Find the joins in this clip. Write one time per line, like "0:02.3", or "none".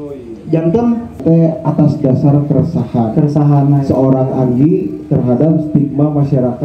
0:01.2